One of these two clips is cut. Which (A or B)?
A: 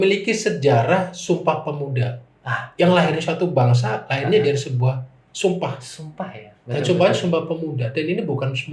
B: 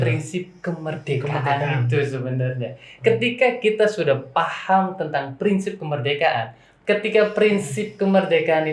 B